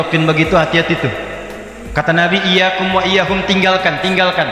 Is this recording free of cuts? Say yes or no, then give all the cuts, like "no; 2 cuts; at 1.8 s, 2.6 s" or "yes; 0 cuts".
yes; 0 cuts